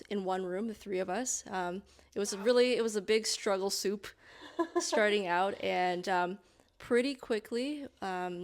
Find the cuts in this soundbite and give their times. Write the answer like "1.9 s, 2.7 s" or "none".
none